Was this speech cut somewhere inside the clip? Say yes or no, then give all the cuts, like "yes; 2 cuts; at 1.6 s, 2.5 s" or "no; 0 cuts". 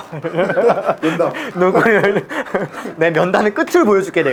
no; 0 cuts